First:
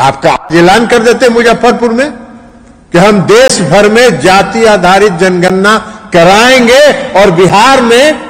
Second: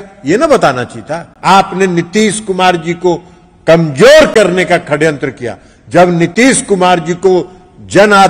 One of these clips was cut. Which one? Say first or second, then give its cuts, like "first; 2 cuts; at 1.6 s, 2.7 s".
second; 1 cut; at 1.2 s